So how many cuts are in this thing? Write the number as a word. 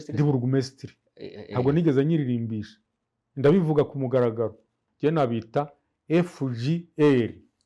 one